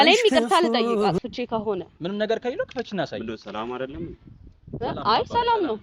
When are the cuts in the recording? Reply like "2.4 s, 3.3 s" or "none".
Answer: none